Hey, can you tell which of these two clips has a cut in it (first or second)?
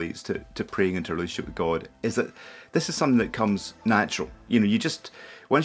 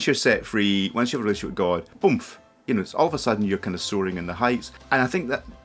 second